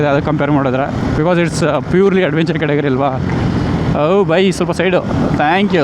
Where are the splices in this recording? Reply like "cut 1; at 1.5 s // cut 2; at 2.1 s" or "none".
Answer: cut 1; at 1.0 s